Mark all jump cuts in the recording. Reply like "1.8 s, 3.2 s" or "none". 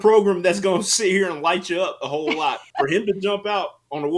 2.6 s